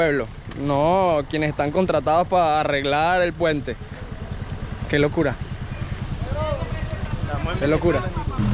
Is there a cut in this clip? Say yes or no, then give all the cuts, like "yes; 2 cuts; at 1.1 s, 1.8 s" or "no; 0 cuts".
no; 0 cuts